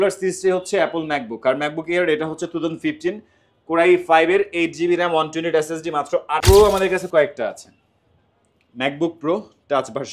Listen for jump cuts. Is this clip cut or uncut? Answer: cut